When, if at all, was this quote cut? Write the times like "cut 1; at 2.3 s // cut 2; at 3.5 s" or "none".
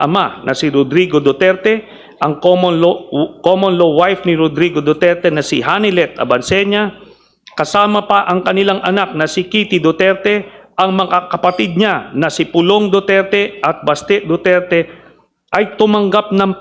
none